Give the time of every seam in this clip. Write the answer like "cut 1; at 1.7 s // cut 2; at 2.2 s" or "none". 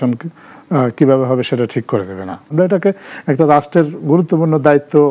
cut 1; at 2.4 s